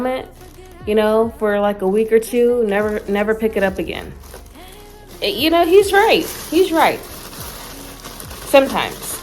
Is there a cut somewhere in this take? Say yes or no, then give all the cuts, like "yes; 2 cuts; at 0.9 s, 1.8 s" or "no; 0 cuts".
no; 0 cuts